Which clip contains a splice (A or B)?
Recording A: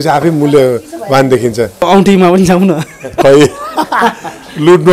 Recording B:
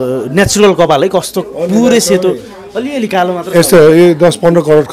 A